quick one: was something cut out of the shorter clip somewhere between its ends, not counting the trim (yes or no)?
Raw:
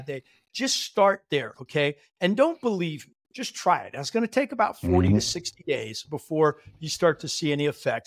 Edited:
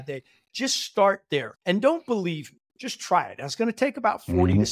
yes